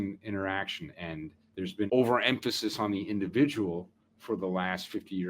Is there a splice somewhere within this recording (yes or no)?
yes